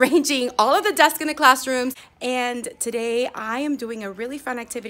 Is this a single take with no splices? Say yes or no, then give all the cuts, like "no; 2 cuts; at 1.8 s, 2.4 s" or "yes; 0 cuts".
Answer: no; 1 cut; at 2.1 s